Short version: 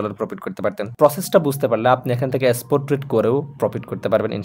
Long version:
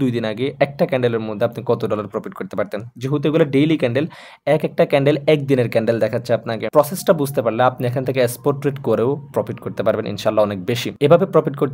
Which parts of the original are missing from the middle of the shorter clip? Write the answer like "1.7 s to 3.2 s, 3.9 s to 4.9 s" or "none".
2.8 s to 6.6 s